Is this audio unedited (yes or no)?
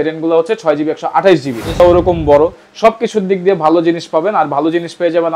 no